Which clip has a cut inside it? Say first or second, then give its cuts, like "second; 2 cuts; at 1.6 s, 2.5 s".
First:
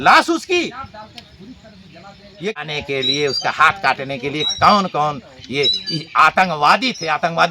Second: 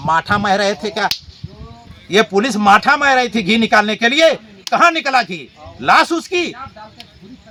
first; 1 cut; at 2.6 s